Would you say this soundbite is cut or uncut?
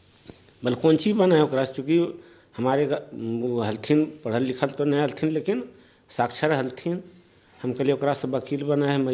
uncut